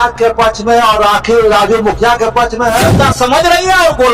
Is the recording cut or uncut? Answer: cut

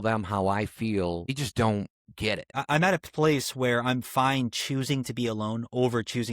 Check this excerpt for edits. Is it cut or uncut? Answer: cut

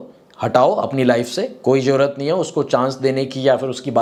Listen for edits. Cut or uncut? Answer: uncut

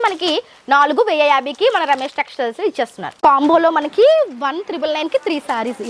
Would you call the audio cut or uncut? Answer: cut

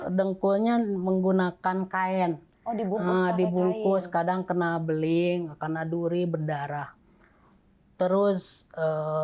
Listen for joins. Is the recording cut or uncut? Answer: uncut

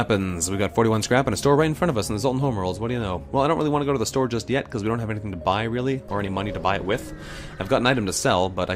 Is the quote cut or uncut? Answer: uncut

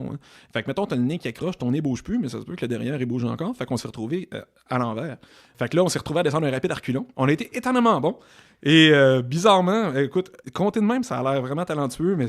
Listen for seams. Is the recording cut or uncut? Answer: cut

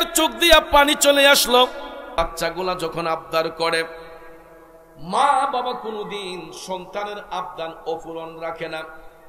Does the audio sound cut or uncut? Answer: cut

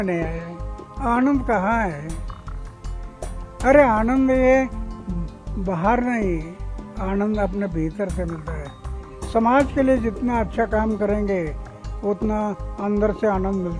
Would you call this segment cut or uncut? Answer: uncut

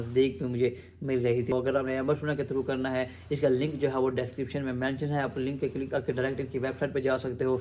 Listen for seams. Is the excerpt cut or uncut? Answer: cut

